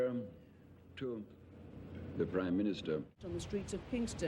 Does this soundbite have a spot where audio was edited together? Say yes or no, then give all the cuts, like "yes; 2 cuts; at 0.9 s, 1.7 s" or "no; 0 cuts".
yes; 1 cut; at 3.2 s